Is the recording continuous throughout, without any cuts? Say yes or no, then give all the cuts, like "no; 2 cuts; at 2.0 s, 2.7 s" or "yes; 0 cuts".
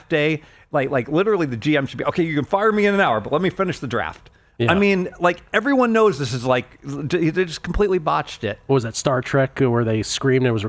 yes; 0 cuts